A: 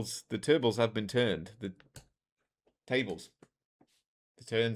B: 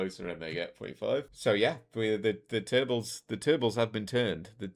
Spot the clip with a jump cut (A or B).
B